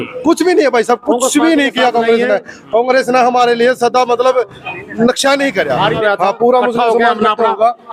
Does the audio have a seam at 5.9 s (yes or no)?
yes